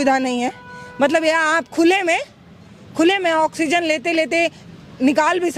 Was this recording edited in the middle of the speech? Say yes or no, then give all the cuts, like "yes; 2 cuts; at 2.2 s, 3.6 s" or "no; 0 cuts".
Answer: no; 0 cuts